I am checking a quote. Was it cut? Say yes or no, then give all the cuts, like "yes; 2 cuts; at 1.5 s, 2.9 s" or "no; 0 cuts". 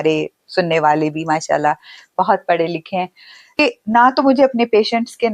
yes; 1 cut; at 3.6 s